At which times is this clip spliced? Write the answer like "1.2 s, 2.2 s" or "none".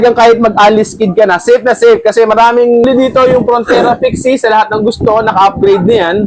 2.8 s